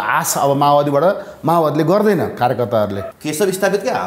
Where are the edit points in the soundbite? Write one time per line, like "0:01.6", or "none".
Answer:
0:03.1